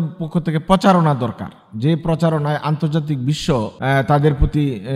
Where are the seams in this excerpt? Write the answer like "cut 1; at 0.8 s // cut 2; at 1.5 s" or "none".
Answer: cut 1; at 3.7 s